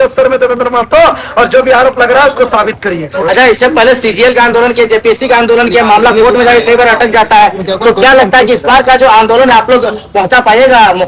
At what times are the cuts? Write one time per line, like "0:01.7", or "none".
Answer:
none